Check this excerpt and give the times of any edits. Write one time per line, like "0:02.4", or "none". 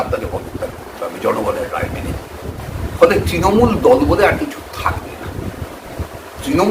0:02.5
0:06.0